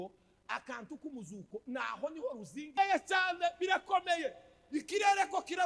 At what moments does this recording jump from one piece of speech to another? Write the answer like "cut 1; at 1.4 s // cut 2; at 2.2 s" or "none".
cut 1; at 2.7 s